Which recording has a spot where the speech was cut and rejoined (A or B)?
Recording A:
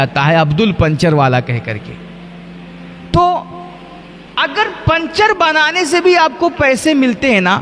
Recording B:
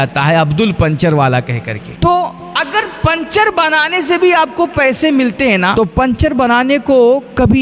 B